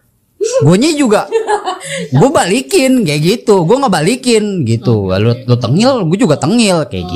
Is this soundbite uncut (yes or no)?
yes